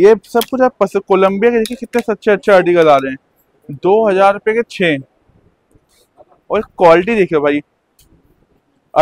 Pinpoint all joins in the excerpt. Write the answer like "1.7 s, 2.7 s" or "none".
none